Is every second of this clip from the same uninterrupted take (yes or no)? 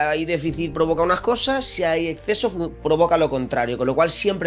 yes